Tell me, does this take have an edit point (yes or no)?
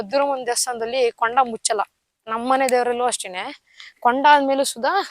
no